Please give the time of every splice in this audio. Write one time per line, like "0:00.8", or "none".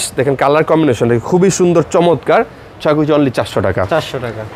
none